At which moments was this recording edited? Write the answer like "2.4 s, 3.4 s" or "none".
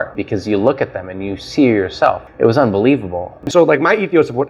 2.2 s, 3.4 s